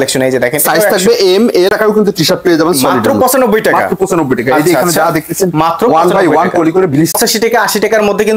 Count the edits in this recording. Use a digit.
2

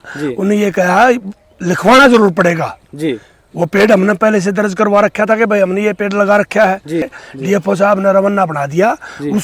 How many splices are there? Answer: 1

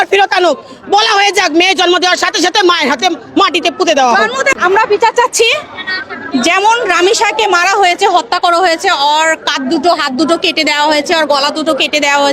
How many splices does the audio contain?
2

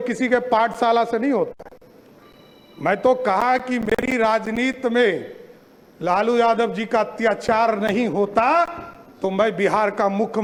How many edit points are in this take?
0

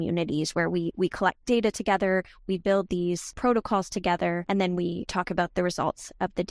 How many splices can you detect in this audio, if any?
2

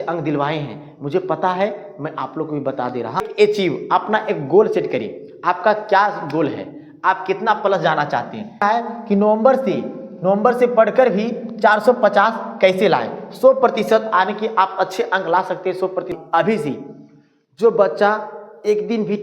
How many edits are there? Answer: 3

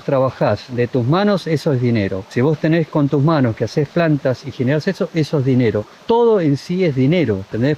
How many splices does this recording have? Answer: 0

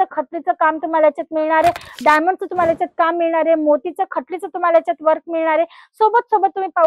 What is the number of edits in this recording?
1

